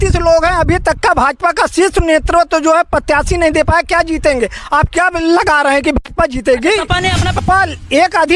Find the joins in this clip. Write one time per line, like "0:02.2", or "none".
0:07.4